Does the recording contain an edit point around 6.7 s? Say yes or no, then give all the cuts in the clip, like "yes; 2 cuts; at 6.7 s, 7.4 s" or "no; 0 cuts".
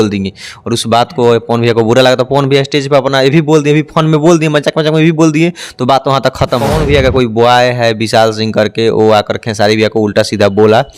yes; 1 cut; at 6.7 s